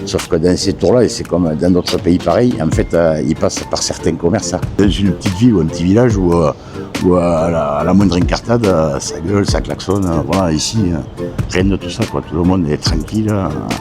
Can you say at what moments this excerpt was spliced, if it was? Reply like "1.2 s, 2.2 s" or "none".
4.8 s